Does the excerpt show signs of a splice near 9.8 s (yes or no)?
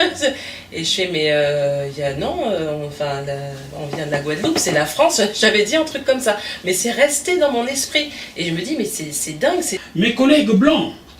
yes